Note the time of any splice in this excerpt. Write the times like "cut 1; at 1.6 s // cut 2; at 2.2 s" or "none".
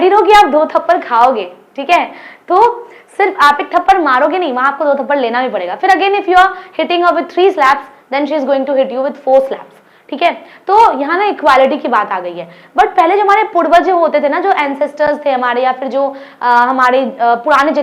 none